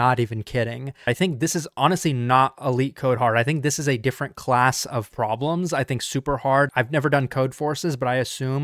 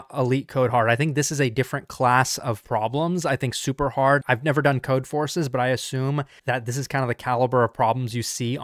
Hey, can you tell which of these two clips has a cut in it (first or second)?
first